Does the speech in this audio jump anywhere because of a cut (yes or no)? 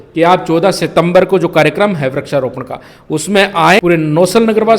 yes